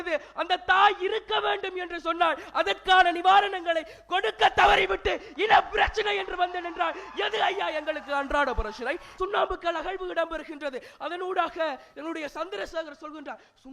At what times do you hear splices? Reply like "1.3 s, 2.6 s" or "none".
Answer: 9.1 s